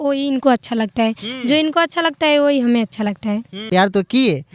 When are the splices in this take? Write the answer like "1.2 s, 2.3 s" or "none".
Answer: 3.6 s